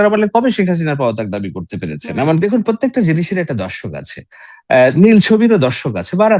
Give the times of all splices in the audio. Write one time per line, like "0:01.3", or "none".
0:02.4